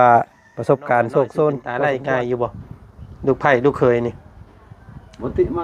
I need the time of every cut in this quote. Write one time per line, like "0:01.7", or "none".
0:01.7